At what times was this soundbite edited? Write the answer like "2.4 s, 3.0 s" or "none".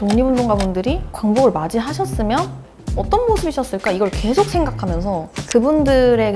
1.1 s, 5.3 s

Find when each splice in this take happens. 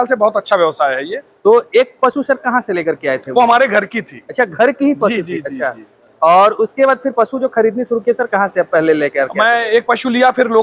none

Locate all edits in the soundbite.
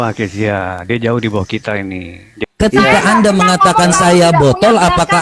2.4 s

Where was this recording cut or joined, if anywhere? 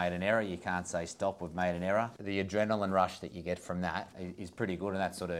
2.2 s, 4.2 s

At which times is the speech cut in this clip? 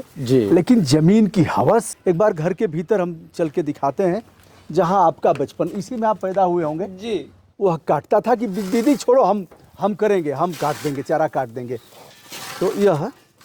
1.9 s, 7.4 s

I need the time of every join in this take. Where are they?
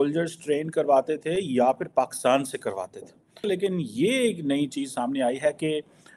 3.5 s

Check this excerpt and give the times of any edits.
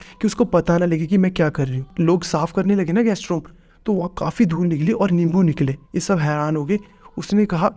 1.8 s, 5.8 s

